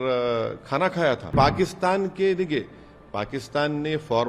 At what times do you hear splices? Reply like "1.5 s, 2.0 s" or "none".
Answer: 1.3 s